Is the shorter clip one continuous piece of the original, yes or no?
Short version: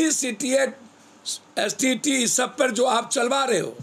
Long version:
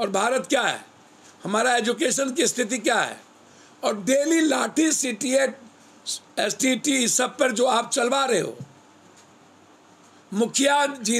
yes